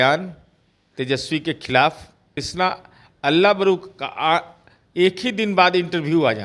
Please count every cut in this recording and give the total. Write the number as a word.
one